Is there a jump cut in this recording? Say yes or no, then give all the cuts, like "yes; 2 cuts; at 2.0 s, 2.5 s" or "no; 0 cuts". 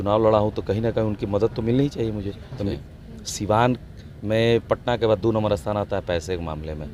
yes; 1 cut; at 2.7 s